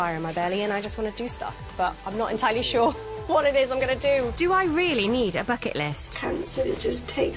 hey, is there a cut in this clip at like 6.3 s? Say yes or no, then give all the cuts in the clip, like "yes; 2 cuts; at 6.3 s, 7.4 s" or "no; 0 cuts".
no; 1 cut; at 4.3 s